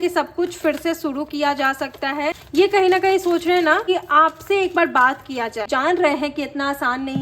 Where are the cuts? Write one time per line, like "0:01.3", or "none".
0:02.4
0:03.9
0:05.7